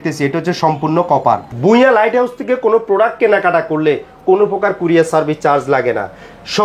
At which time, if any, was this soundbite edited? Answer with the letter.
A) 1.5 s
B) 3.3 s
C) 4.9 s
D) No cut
A